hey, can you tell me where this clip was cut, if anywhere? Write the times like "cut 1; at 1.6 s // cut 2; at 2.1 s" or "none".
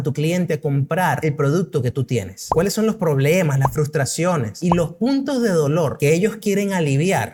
none

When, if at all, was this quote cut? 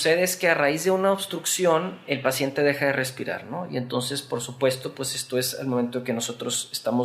cut 1; at 2.0 s

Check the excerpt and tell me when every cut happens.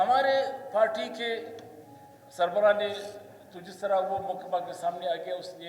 none

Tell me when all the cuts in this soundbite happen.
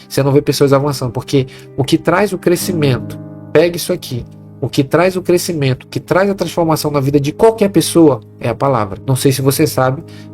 cut 1; at 9.0 s

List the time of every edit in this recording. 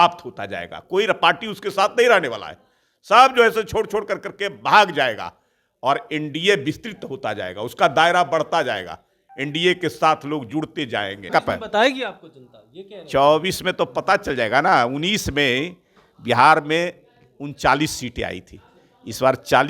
cut 1; at 11.3 s

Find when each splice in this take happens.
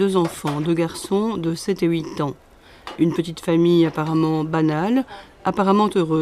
cut 1; at 4.2 s

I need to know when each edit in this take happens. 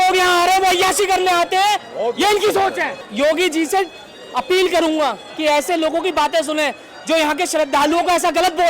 cut 1; at 3.1 s

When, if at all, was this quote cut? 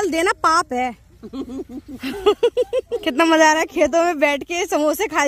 cut 1; at 2.9 s

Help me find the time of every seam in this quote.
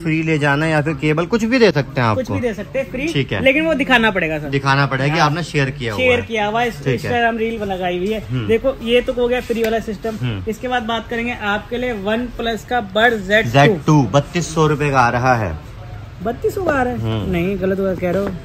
none

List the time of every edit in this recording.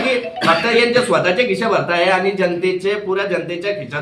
none

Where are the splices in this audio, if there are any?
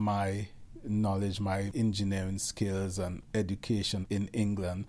cut 1; at 1.7 s // cut 2; at 3.2 s // cut 3; at 4.0 s

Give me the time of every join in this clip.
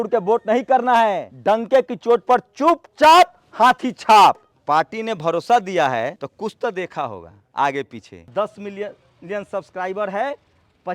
cut 1; at 1.3 s // cut 2; at 4.5 s // cut 3; at 6.2 s // cut 4; at 8.3 s

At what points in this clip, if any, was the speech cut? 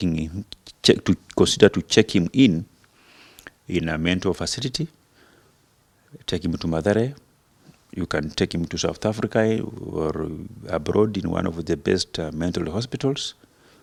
none

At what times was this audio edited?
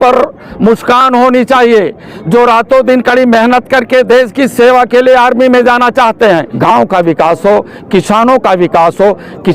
cut 1; at 6.5 s

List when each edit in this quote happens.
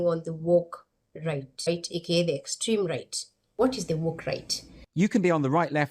cut 1; at 1.6 s // cut 2; at 3.4 s

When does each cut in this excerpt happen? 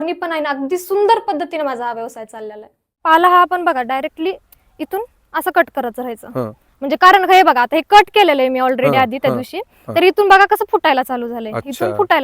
cut 1; at 2.9 s

